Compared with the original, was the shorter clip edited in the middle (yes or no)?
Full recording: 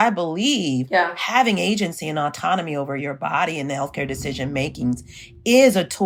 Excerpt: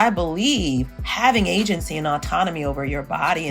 yes